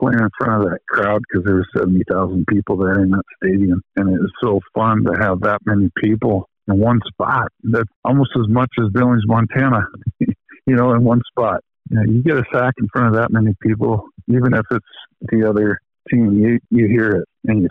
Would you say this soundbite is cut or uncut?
cut